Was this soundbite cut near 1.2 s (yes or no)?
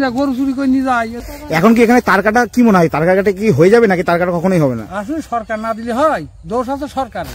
yes